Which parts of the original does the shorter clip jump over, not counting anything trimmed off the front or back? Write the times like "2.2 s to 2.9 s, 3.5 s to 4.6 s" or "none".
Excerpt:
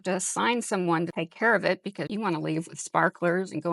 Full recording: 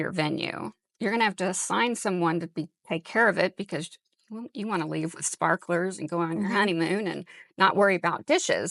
2.5 s to 2.9 s, 3.8 s to 4.5 s